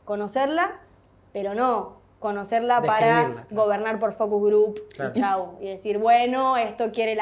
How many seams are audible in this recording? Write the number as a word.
zero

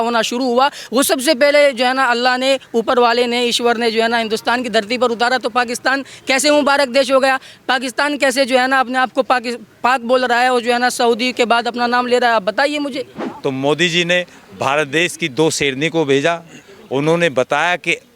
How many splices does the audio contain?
one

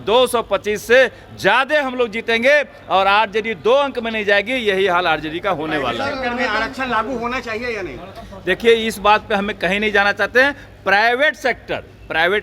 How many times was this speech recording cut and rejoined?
zero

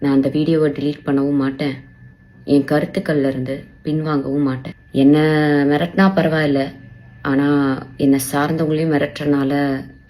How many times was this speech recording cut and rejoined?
one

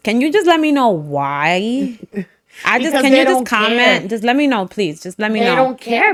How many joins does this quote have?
zero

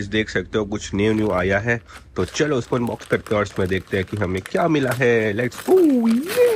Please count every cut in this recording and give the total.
zero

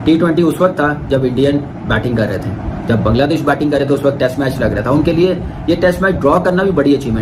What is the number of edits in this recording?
zero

